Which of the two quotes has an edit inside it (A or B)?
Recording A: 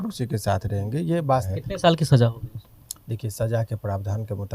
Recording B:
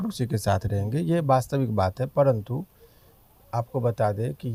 A